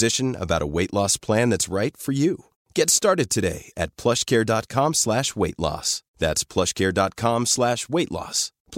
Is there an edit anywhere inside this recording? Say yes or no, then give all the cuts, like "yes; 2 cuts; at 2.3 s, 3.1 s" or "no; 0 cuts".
no; 0 cuts